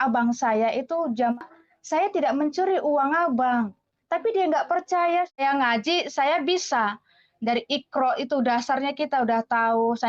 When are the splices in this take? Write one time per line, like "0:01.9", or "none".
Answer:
0:01.4
0:05.4